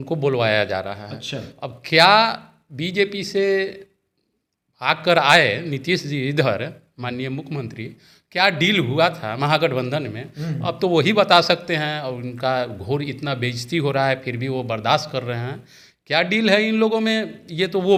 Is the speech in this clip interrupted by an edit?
no; 0 cuts

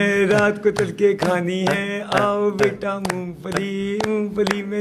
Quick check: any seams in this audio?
no; 0 cuts

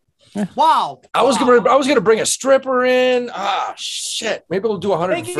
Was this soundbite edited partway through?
yes; 1 cut; at 1.0 s

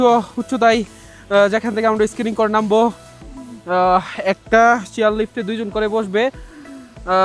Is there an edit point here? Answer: no; 0 cuts

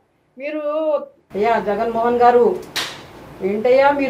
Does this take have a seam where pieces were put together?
yes; 1 cut; at 1.2 s

